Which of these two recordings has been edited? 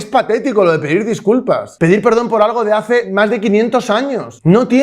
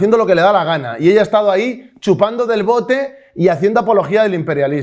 first; 2 cuts; at 1.7 s, 3.1 s

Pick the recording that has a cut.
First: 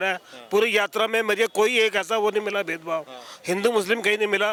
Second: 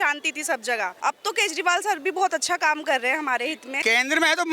second; 2 cuts; at 0.9 s, 3.7 s

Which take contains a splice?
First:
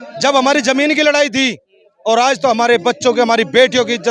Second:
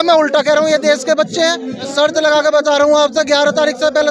second; 1 cut; at 1.9 s

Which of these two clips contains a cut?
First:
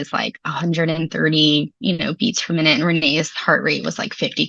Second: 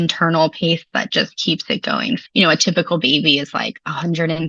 second; 1 cut; at 2.2 s

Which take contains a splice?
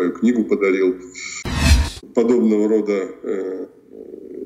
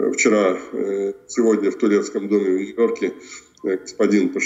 first; 1 cut; at 1.7 s

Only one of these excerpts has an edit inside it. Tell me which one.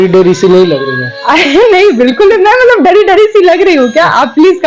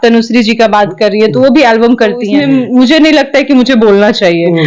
second; 1 cut; at 2.3 s

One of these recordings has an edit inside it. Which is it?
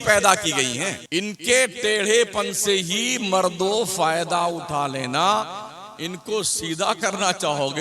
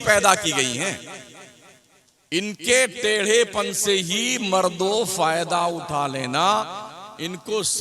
first; 1 cut; at 0.9 s

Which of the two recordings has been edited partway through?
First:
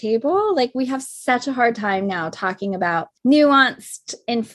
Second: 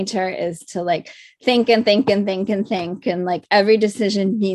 first; 1 cut; at 3.1 s

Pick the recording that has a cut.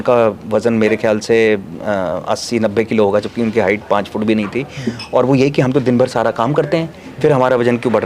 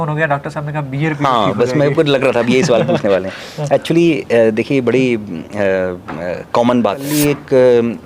second; 1 cut; at 7.1 s

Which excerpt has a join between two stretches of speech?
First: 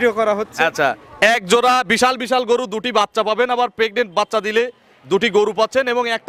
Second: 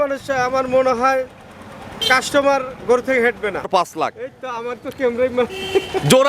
second; 1 cut; at 3.7 s

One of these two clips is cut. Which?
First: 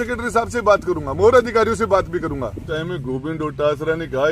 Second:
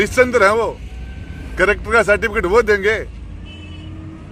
first; 1 cut; at 2.6 s

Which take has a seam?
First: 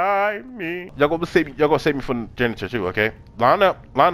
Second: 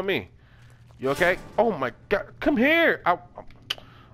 first; 1 cut; at 0.9 s

